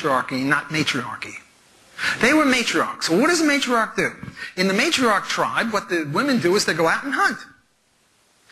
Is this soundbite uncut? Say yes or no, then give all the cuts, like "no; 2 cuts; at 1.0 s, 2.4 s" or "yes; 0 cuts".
no; 1 cut; at 6.1 s